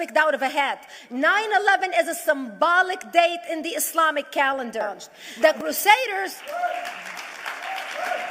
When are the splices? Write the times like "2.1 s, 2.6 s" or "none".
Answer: 5.4 s